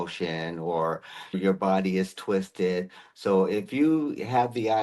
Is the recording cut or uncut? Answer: cut